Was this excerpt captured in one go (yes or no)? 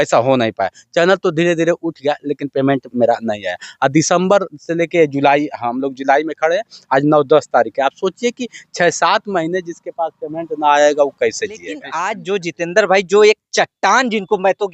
no